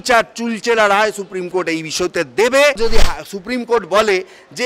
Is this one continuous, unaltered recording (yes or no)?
no